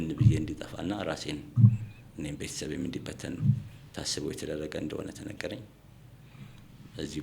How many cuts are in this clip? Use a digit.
0